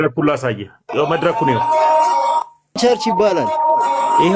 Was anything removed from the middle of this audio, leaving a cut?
yes; 1 cut; at 2.8 s

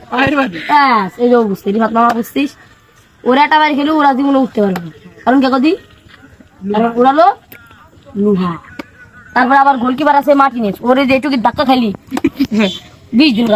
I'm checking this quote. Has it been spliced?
no; 0 cuts

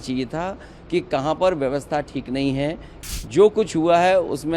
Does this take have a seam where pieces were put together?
yes; 1 cut; at 2.9 s

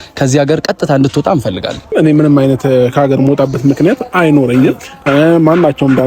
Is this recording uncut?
no; 1 cut; at 1.9 s

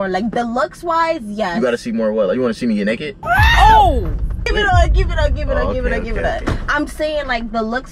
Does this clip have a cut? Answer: yes; 1 cut; at 4.5 s

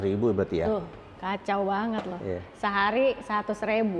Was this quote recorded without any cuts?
yes; 0 cuts

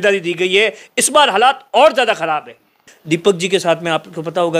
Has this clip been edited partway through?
yes; 1 cut; at 2.8 s

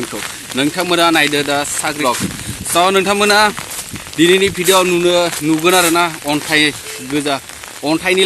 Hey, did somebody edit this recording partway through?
yes; 1 cut; at 2.0 s

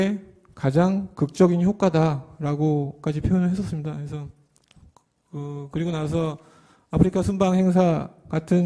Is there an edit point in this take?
yes; 1 cut; at 7.7 s

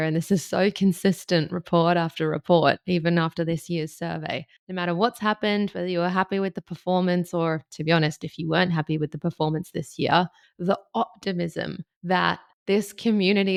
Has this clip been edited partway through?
no; 0 cuts

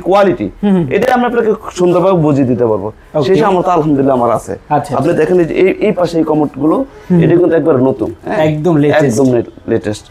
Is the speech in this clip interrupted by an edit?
no; 0 cuts

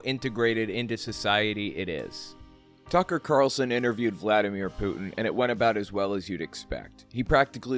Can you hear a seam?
yes; 1 cut; at 2.6 s

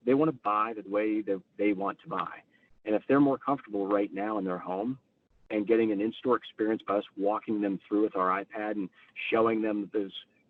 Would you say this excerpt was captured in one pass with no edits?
yes; 0 cuts

